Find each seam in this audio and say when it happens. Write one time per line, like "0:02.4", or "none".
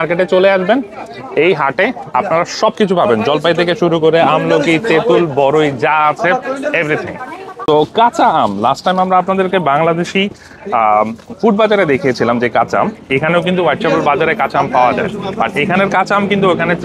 none

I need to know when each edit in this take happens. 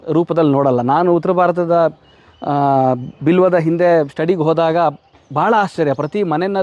none

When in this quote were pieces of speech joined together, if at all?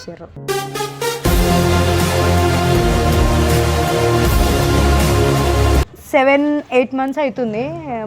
0:06.0

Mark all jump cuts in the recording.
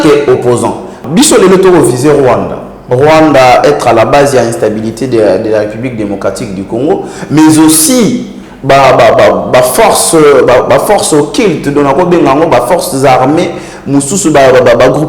0:01.0

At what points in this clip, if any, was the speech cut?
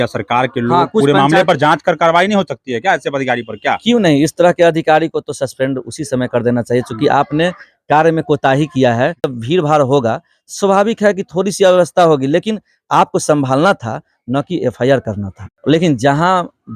0:09.4
0:15.5

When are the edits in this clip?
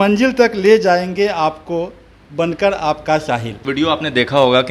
0:03.6

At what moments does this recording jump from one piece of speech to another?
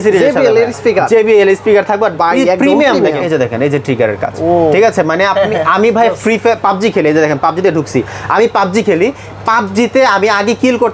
0:03.2

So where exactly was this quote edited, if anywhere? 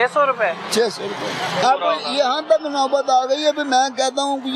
0:01.6

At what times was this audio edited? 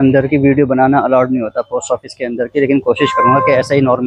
none

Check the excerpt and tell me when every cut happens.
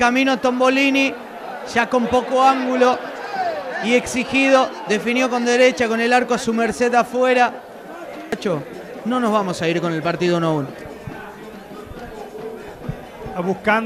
none

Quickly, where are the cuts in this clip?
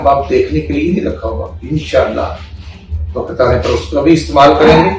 none

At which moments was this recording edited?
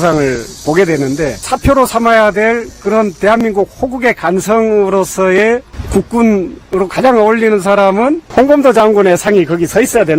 0:01.5
0:05.8
0:08.2

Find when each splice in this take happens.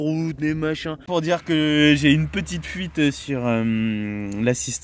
0:01.1

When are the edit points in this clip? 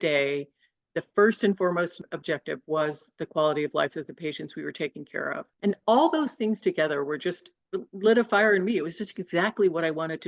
none

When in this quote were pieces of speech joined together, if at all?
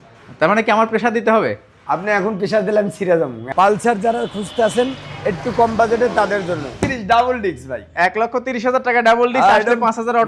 0:03.5
0:06.7

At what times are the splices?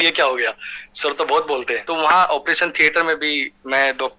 0:01.8

